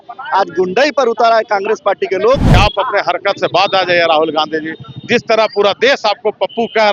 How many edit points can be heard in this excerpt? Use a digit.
1